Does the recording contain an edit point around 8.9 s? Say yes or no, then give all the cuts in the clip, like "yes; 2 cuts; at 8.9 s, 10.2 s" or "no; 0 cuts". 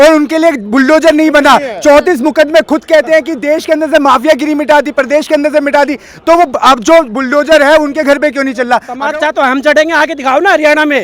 yes; 1 cut; at 8.9 s